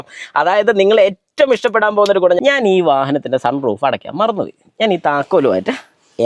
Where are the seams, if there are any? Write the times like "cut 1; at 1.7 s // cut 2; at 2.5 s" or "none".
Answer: cut 1; at 2.4 s